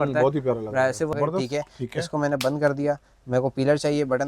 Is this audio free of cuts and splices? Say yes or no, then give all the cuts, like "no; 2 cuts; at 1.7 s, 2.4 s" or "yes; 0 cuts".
no; 1 cut; at 1.2 s